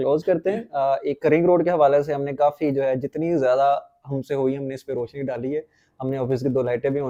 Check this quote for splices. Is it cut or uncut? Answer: uncut